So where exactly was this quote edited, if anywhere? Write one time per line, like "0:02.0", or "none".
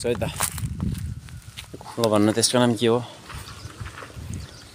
0:01.8